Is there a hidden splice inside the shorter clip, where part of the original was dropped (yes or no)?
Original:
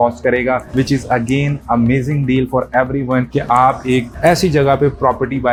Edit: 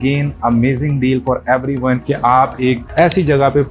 no